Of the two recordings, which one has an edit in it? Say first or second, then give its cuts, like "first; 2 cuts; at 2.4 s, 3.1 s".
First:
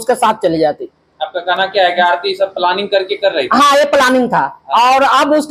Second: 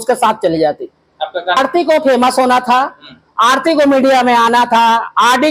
second; 1 cut; at 1.6 s